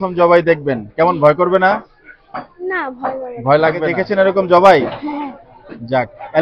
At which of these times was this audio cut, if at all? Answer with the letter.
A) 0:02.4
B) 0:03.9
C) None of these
B